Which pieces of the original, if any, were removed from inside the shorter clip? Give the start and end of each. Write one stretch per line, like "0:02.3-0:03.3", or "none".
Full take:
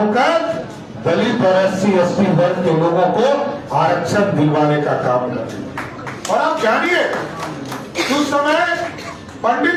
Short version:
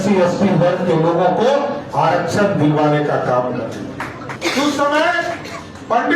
0:06.0-0:07.8